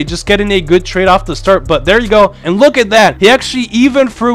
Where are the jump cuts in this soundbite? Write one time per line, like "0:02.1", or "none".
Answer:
0:02.5